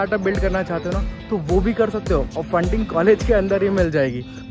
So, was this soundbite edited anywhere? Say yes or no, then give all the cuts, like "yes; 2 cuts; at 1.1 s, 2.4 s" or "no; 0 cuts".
no; 0 cuts